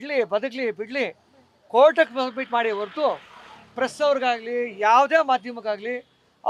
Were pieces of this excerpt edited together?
no; 0 cuts

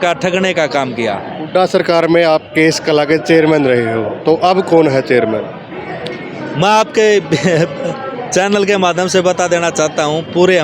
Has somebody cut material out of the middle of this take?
no; 0 cuts

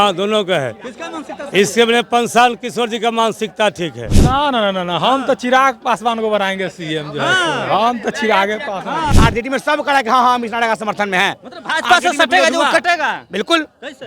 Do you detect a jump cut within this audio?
yes; 2 cuts; at 4.0 s, 9.1 s

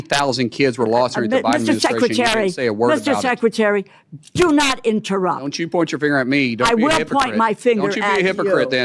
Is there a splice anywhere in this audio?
no; 0 cuts

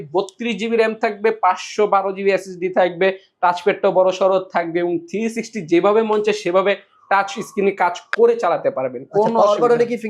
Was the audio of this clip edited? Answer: no; 0 cuts

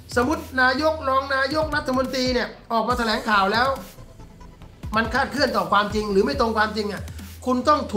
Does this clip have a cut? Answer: no; 0 cuts

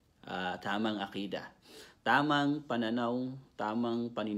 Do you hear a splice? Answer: no; 0 cuts

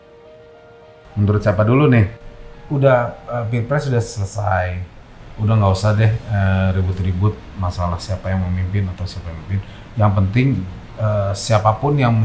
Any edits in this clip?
yes; 1 cut; at 2.2 s

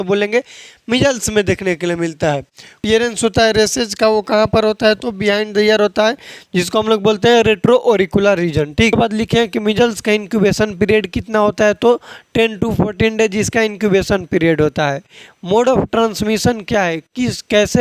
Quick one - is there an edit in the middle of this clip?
yes; 2 cuts; at 2.9 s, 8.9 s

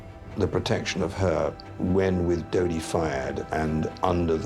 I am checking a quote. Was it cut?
yes; 1 cut; at 1.7 s

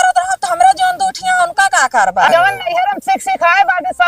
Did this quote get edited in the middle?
yes; 1 cut; at 2.3 s

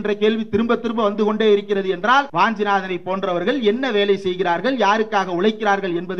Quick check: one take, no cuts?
no; 1 cut; at 2.3 s

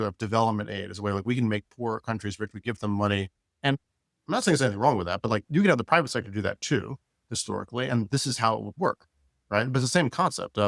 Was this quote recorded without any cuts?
yes; 0 cuts

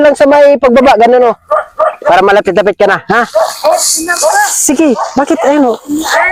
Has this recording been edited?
no; 0 cuts

